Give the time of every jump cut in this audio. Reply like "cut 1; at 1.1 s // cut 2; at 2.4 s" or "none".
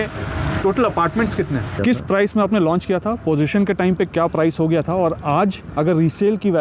cut 1; at 1.8 s